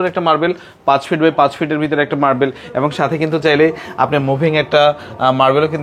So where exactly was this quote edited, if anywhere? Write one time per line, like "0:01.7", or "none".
none